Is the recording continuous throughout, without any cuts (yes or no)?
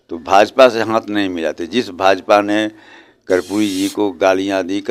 yes